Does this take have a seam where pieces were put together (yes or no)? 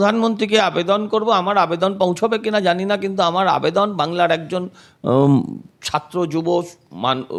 no